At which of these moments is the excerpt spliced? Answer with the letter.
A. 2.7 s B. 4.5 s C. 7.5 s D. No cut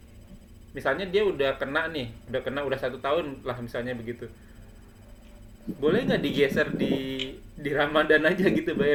D